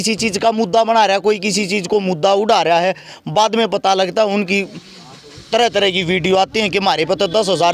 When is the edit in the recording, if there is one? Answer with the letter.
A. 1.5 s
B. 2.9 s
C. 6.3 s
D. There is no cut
D